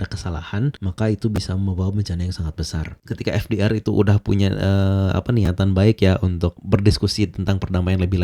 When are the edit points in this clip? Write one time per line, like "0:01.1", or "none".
0:03.0